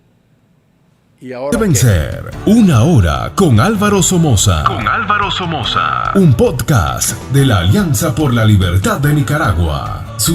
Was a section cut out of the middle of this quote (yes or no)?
yes